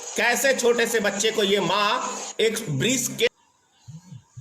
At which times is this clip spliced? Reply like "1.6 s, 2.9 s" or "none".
3.3 s